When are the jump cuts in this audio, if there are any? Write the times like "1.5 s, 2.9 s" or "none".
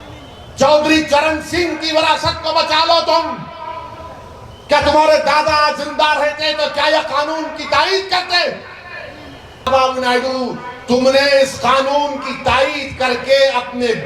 9.7 s

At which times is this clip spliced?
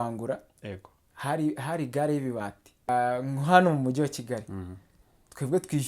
2.9 s

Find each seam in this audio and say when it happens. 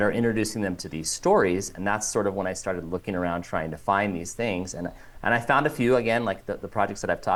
none

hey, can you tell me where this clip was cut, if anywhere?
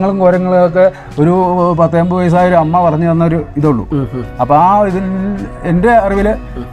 none

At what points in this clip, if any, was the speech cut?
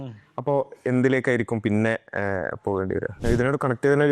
3.1 s

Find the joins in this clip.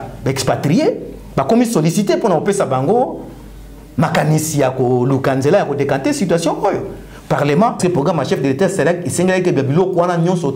7.8 s

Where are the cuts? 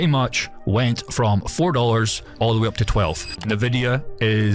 2.2 s, 3.4 s

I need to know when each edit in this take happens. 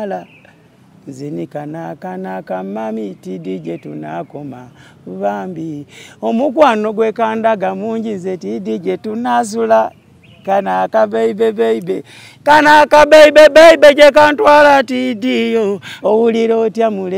15.9 s

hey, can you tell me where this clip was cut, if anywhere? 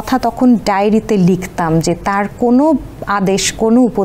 none

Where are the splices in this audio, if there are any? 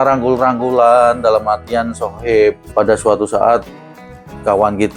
2.6 s

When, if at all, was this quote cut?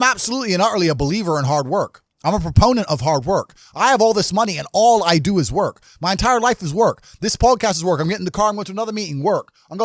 none

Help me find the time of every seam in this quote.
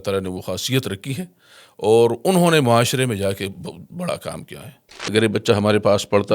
4.9 s

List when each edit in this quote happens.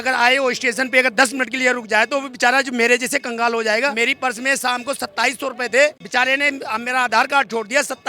3.9 s

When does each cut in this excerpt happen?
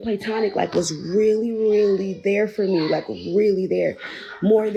none

